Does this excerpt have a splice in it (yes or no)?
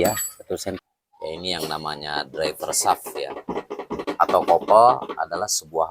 yes